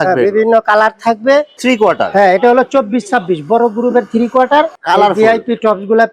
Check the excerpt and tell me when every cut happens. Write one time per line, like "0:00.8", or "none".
0:01.6
0:04.8